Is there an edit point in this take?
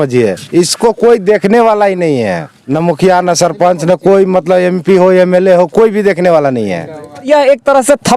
yes; 2 cuts; at 2.5 s, 7.3 s

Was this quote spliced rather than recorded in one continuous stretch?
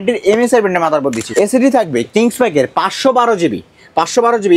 yes; 1 cut; at 1.2 s

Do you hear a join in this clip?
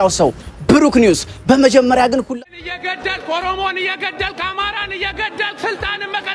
yes; 1 cut; at 2.3 s

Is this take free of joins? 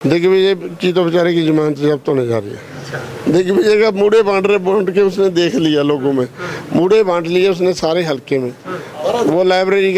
yes; 0 cuts

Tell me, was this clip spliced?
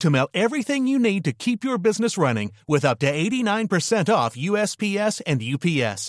no; 0 cuts

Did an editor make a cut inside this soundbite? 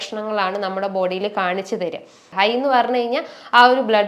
yes; 1 cut; at 2.2 s

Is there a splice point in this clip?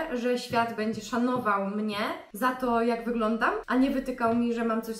yes; 2 cuts; at 2.2 s, 3.6 s

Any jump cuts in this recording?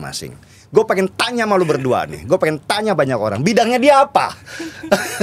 no; 0 cuts

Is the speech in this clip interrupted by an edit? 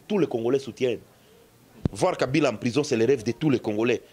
no; 0 cuts

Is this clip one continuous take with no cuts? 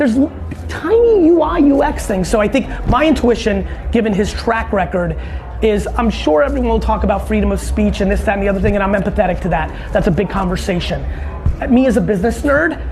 yes; 0 cuts

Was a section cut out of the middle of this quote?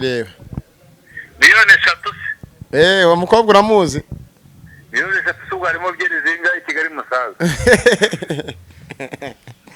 no; 0 cuts

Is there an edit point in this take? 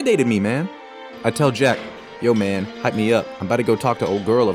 no; 0 cuts

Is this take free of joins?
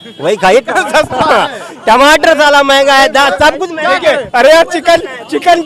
yes; 0 cuts

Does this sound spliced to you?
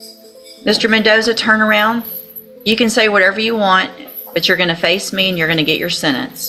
no; 0 cuts

